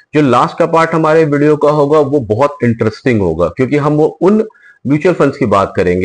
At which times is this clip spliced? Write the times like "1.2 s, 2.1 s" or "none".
none